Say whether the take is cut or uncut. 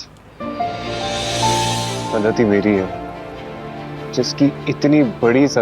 cut